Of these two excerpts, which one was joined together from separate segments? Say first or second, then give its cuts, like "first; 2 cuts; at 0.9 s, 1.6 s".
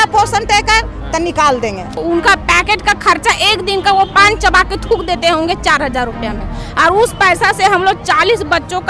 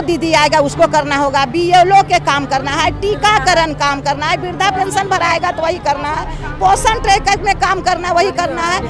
first; 1 cut; at 2.0 s